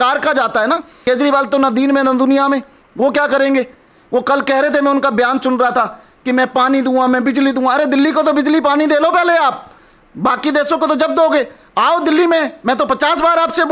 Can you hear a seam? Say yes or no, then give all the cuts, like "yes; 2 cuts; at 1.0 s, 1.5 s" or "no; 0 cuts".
yes; 1 cut; at 0.9 s